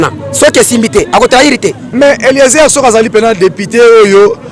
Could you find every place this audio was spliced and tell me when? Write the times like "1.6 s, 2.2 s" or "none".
1.8 s